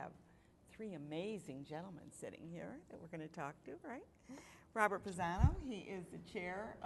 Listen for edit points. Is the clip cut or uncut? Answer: uncut